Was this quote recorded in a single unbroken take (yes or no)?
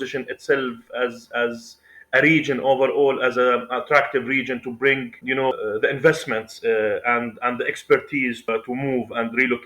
no